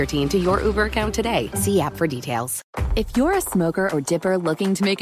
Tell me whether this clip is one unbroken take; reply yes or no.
no